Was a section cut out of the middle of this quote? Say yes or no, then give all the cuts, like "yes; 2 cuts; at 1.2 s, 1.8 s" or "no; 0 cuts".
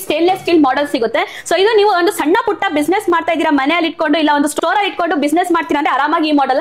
no; 0 cuts